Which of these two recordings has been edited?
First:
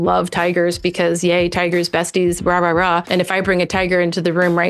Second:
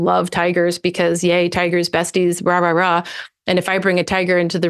first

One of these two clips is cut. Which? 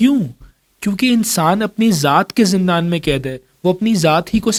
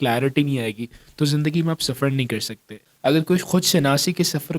second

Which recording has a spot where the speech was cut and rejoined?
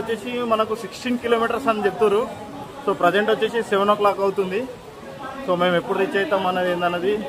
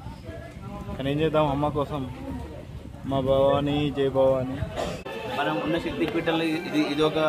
second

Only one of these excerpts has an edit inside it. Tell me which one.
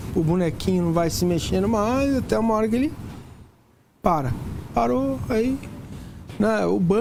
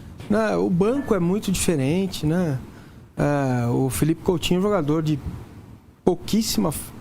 second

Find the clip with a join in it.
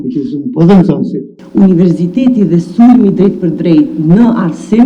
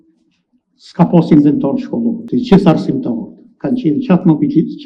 first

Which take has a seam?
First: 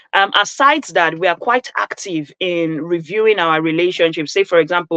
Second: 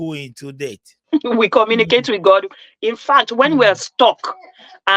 second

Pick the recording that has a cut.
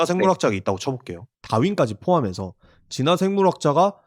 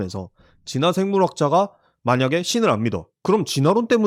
first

